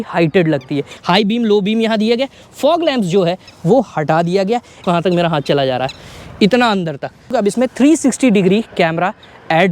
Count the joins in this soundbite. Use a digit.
3